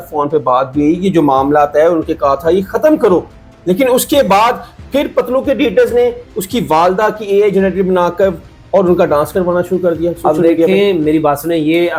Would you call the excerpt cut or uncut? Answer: uncut